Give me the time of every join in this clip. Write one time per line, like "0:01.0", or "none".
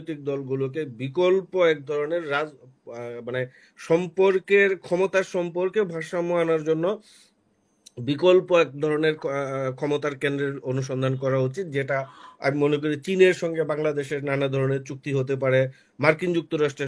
none